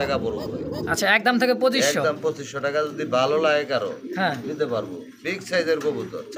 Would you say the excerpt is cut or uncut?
uncut